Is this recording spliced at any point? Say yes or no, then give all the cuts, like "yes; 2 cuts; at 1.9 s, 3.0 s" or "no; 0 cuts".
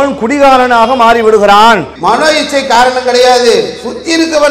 yes; 1 cut; at 1.9 s